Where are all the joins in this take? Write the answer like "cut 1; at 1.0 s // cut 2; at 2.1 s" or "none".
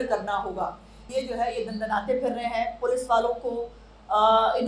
cut 1; at 1.0 s